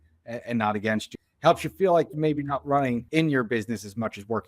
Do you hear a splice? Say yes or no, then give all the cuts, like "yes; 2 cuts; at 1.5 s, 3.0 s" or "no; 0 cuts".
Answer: yes; 2 cuts; at 1.1 s, 3.1 s